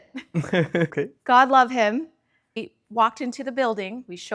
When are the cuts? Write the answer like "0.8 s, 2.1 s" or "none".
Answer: 0.9 s, 2.6 s